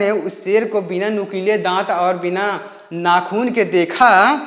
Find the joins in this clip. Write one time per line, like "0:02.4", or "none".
none